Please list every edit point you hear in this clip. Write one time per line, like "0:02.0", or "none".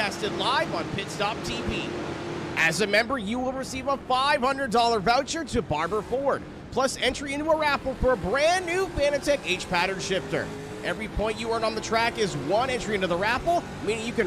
none